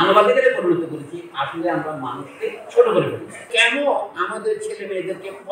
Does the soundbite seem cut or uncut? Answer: cut